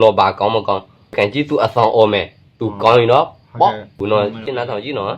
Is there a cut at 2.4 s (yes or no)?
no